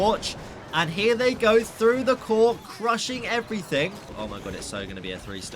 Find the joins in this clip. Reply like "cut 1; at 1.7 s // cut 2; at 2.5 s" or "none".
cut 1; at 4.1 s